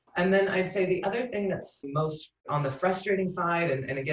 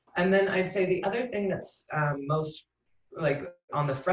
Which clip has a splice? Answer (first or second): first